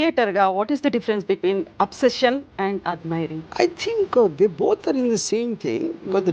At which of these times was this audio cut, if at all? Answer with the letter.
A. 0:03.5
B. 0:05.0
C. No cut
A